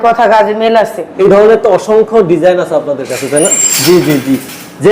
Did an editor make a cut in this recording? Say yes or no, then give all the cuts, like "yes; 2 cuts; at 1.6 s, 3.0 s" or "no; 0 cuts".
yes; 1 cut; at 1.0 s